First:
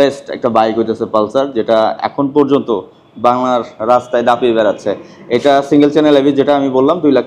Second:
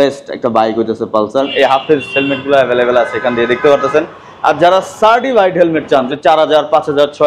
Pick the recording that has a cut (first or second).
second